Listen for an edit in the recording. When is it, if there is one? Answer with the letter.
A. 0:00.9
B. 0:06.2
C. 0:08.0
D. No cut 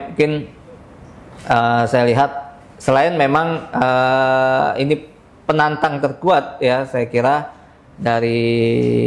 D